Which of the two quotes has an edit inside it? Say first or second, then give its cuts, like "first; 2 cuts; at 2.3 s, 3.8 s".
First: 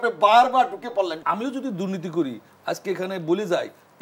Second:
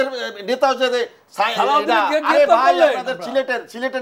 first; 1 cut; at 1.2 s